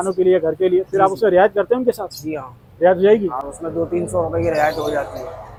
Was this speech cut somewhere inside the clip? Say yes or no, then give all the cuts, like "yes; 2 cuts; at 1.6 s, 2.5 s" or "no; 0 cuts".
no; 0 cuts